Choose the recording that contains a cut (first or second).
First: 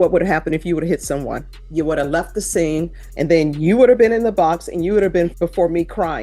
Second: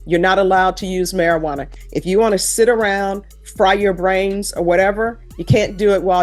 first